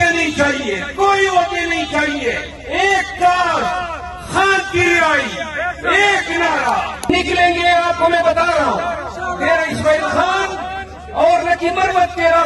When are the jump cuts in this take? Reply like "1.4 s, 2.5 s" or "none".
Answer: 7.1 s